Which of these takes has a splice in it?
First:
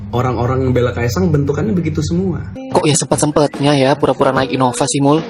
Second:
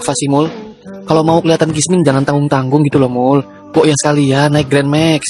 first; 1 cut; at 2.5 s

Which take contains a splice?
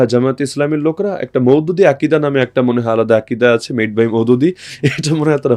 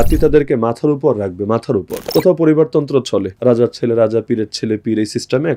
second; 2 cuts; at 2.0 s, 3.3 s

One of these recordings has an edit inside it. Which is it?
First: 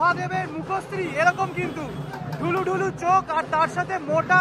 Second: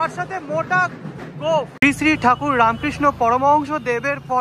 second; 1 cut; at 1.9 s

